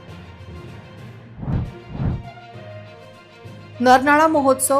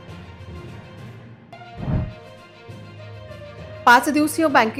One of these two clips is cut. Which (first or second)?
first